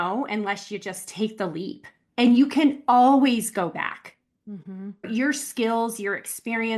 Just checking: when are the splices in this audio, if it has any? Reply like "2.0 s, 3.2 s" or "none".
5.1 s